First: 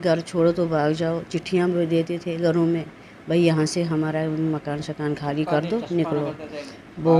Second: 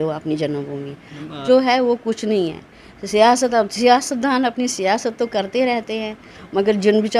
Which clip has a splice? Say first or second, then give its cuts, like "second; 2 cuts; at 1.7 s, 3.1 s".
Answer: second; 1 cut; at 1.4 s